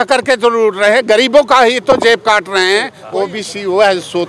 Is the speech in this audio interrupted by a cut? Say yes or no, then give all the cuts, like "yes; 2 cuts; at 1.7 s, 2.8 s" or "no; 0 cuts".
yes; 1 cut; at 3.0 s